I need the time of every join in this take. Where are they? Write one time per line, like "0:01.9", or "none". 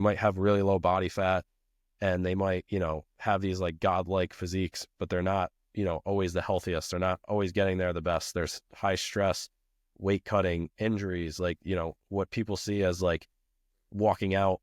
none